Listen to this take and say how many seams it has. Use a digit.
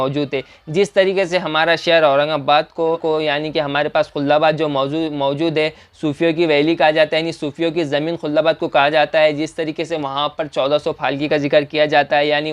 1